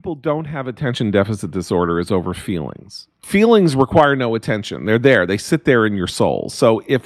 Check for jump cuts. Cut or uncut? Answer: cut